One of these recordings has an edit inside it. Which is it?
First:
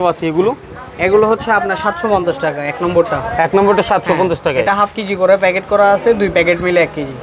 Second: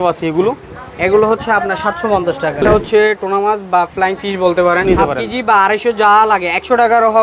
second; 2 cuts; at 2.6 s, 4.8 s

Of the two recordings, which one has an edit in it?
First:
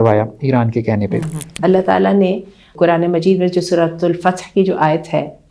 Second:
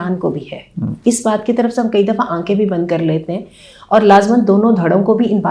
first; 2 cuts; at 1.4 s, 2.7 s

